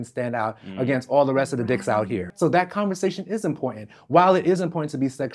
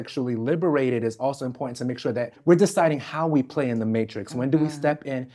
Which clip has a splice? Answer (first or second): first